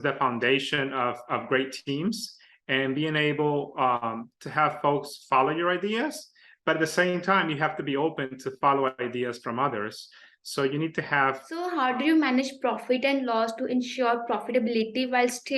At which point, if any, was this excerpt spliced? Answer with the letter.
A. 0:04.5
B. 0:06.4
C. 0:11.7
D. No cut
C